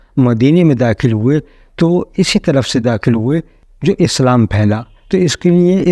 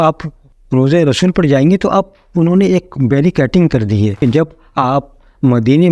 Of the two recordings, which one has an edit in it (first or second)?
second